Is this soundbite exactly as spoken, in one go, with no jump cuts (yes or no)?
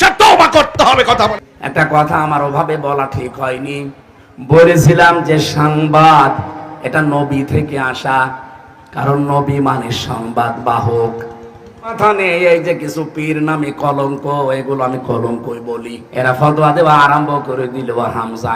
no